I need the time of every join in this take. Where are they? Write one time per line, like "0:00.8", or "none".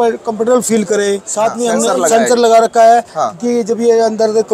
0:01.3